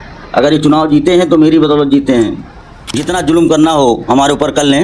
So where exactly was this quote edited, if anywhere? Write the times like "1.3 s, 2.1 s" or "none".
3.0 s